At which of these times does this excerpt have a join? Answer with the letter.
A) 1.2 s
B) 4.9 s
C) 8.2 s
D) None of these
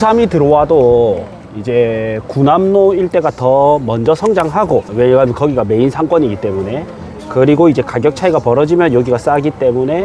B